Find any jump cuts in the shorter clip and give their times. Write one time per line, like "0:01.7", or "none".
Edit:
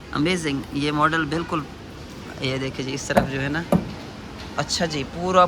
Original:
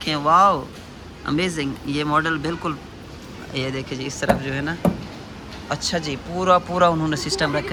none